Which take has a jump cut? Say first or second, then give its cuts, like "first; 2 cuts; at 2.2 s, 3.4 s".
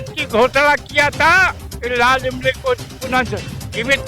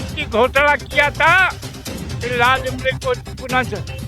first; 1 cut; at 1.7 s